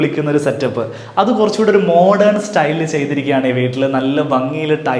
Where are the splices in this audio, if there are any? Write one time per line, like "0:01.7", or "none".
none